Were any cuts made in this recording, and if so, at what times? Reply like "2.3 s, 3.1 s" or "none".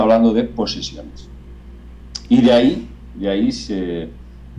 none